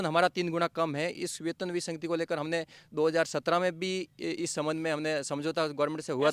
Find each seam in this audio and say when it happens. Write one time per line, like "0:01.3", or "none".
none